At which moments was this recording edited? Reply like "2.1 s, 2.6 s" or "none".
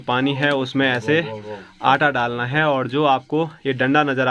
none